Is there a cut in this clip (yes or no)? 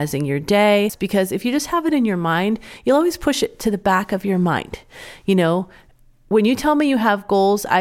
yes